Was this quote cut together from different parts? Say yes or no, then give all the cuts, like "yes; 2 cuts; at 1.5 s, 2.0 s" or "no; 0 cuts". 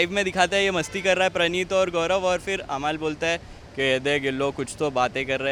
no; 0 cuts